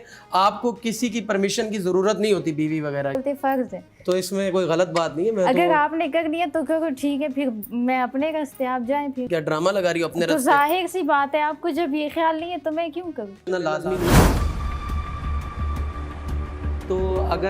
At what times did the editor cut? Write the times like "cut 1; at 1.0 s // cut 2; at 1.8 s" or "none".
cut 1; at 3.2 s // cut 2; at 9.3 s // cut 3; at 13.4 s